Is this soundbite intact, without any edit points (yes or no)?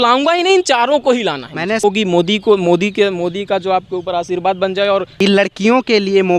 no